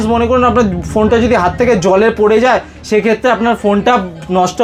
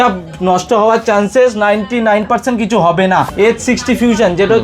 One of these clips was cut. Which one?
second; 1 cut; at 3.3 s

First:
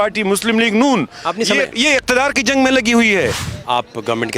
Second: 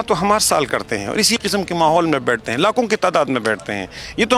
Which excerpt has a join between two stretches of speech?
first; 1 cut; at 3.5 s

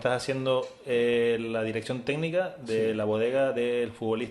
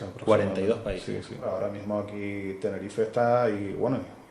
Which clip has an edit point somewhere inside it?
second; 1 cut; at 1.5 s

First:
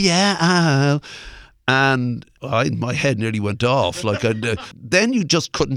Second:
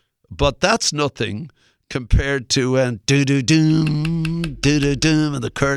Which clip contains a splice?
first; 2 cuts; at 2.3 s, 4.6 s

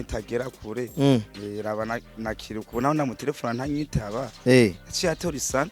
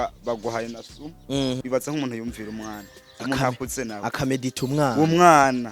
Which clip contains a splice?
second; 1 cut; at 1.6 s

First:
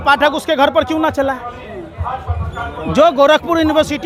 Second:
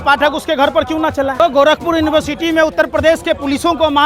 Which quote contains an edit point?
second; 1 cut; at 1.4 s

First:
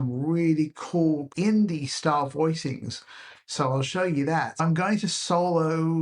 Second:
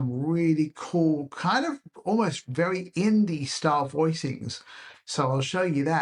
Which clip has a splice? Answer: first; 1 cut; at 1.3 s

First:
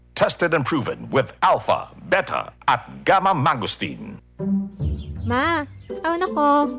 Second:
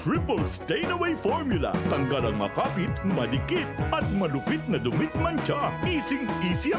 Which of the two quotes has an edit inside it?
first; 1 cut; at 4.3 s

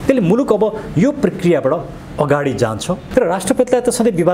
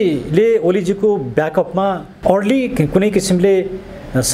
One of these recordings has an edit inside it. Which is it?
first; 1 cut; at 3.0 s

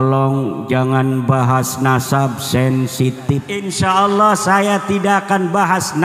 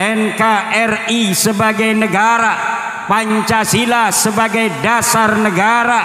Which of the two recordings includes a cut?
first; 1 cut; at 3.6 s

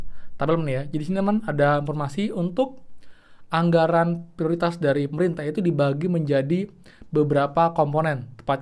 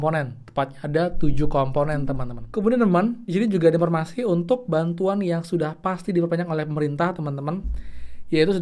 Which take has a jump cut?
second; 1 cut; at 2.3 s

